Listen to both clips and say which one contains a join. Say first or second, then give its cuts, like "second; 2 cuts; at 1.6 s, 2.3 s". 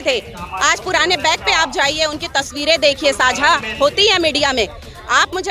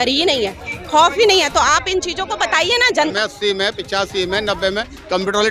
second; 1 cut; at 3.1 s